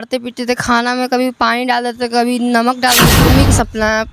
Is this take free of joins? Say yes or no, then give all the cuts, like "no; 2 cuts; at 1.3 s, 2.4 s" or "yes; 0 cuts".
no; 1 cut; at 3.2 s